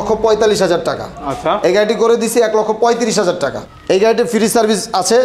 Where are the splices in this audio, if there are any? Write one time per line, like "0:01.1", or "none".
0:03.6